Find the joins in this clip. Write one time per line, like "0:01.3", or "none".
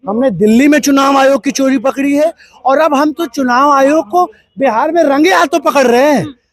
none